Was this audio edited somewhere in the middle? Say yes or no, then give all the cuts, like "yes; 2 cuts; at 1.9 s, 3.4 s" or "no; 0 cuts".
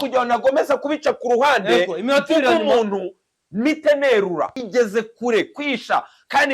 yes; 1 cut; at 4.6 s